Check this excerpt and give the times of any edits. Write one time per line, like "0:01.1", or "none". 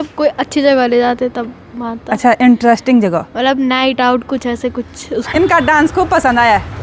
0:05.1